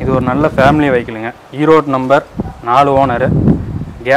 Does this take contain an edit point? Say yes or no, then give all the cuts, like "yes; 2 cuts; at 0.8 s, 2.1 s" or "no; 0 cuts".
no; 0 cuts